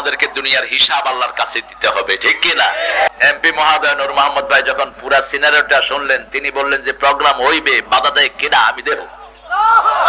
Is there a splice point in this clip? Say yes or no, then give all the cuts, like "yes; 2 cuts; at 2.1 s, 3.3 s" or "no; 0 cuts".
yes; 1 cut; at 3.1 s